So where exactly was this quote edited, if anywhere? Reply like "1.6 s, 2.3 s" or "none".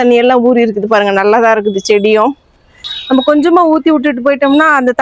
2.9 s